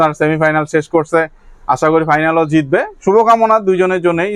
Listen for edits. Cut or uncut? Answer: uncut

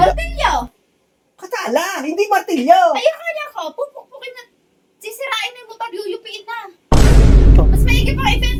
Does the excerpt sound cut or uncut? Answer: uncut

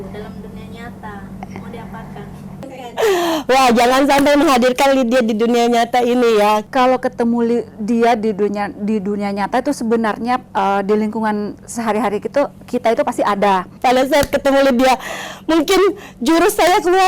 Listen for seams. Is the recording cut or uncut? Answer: cut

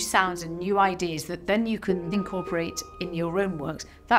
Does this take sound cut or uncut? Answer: cut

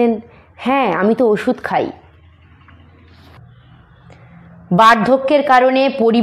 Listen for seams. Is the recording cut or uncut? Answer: cut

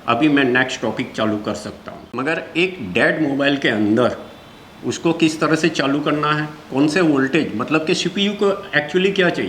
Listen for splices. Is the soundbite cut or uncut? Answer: cut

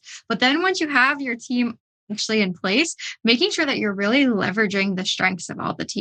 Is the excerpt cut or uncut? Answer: uncut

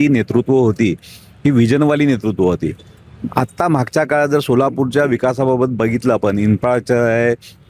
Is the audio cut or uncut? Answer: uncut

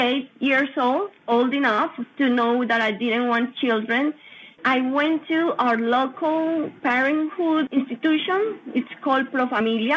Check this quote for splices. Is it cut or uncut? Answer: cut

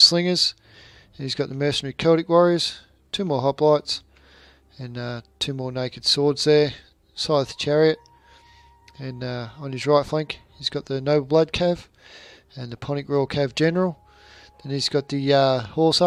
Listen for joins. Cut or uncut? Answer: uncut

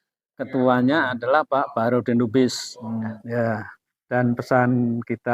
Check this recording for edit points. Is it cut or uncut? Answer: cut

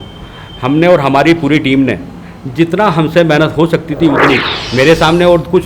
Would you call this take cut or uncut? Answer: cut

